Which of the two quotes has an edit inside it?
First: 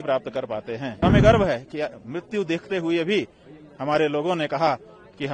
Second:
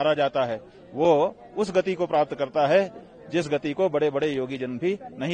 first; 1 cut; at 1.0 s

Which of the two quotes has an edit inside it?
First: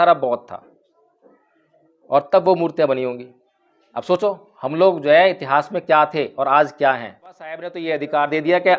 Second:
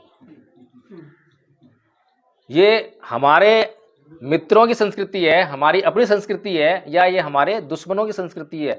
first; 1 cut; at 7.8 s

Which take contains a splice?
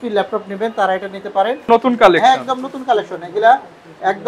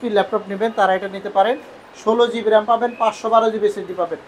first; 1 cut; at 1.7 s

